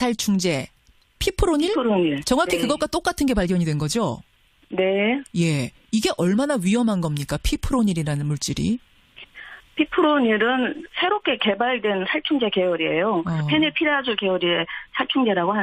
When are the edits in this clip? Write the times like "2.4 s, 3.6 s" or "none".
13.4 s